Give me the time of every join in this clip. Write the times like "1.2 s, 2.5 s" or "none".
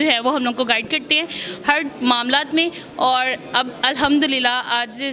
none